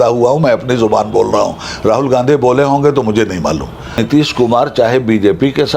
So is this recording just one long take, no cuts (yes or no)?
no